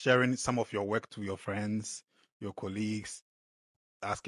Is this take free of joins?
yes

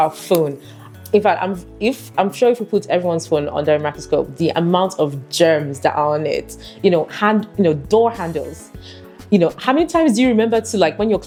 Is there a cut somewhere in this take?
no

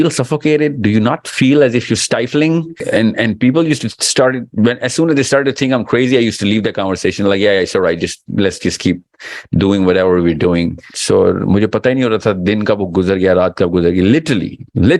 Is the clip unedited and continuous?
no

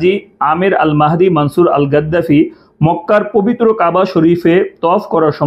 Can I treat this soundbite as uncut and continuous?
yes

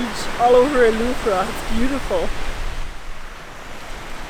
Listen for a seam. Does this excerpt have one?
no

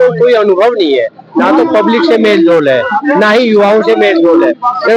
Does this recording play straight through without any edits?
yes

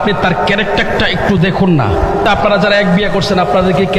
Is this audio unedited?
yes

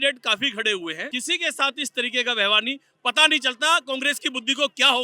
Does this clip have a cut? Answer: yes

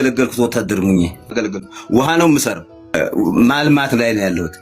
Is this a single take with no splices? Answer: no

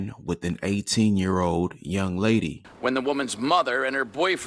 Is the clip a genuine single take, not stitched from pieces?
no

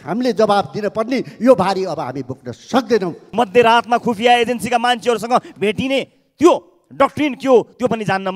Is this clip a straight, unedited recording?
no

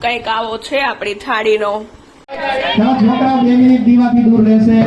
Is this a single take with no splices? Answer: no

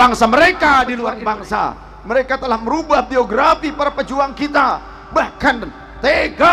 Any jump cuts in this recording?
yes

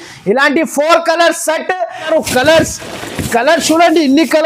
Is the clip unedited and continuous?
no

